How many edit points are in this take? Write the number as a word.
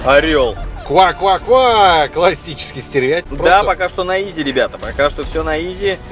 one